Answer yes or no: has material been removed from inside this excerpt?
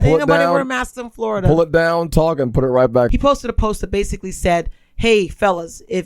yes